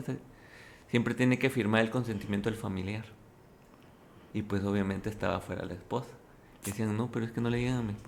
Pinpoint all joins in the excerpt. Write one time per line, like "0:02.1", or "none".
none